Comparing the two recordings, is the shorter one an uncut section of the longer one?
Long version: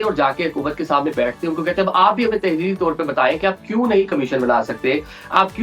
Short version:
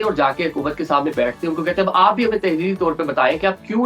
yes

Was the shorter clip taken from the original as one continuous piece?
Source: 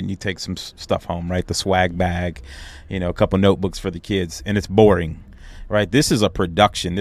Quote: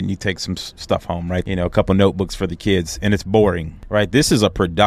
no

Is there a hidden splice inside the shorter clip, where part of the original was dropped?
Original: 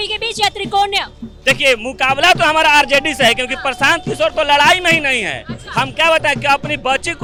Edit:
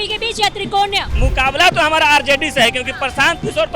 yes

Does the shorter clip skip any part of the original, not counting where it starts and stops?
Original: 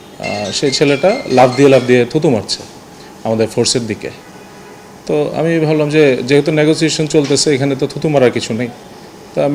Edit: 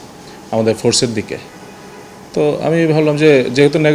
no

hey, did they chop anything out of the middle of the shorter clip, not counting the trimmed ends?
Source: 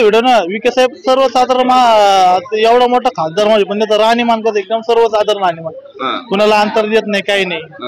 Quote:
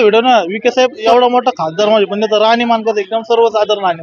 yes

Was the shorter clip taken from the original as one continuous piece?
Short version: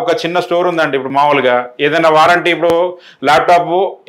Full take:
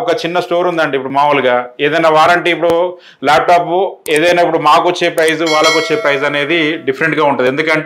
yes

